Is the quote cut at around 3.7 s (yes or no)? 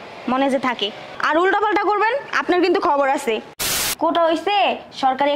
yes